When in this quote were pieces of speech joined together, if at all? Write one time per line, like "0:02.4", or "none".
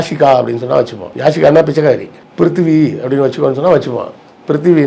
0:01.0
0:02.2

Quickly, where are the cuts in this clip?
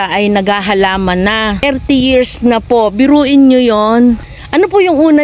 0:01.6
0:04.4

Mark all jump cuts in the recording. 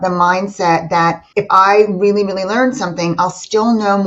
0:01.2

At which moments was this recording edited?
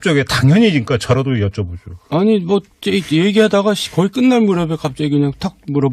0:03.3

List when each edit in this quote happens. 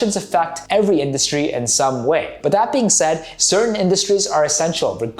0:02.3
0:03.3

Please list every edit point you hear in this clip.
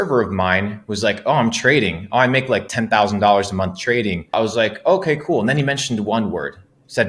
0:04.3

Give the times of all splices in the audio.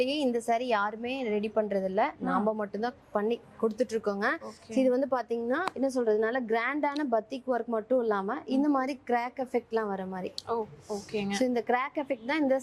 none

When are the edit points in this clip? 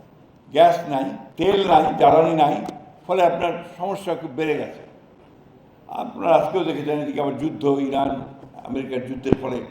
0:01.2

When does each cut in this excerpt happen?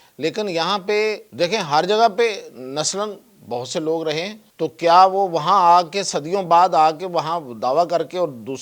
0:01.3
0:04.4

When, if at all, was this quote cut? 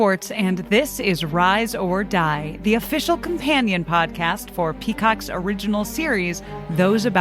none

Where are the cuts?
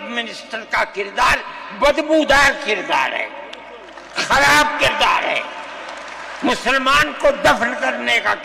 none

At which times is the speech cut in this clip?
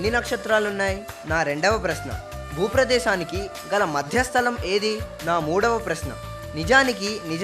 0:01.1
0:05.1

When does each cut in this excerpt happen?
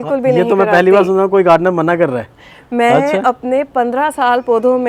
none

